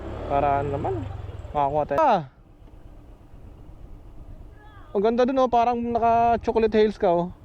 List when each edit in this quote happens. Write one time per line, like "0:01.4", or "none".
0:02.0